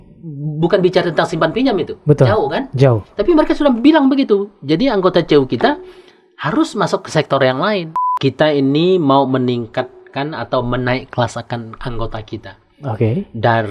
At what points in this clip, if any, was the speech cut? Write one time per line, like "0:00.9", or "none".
0:08.0